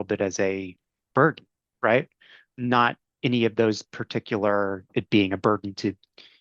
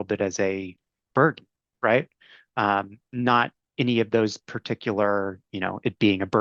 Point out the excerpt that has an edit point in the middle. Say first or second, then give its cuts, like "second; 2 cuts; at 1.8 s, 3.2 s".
first; 2 cuts; at 2.4 s, 4.9 s